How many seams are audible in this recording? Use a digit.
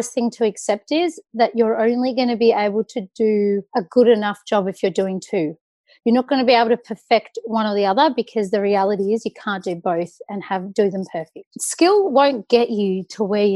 1